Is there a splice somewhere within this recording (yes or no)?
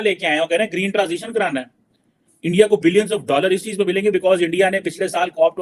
no